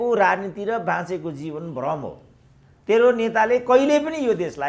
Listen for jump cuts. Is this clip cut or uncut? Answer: uncut